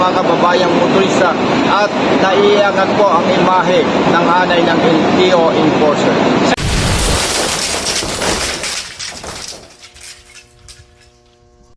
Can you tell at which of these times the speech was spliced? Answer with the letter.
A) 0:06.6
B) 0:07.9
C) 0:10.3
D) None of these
A